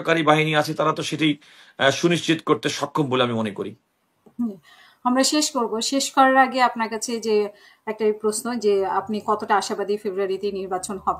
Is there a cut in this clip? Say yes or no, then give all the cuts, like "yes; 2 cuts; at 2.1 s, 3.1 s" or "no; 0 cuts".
no; 0 cuts